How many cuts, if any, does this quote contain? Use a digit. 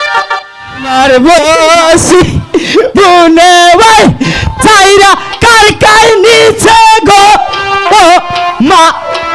1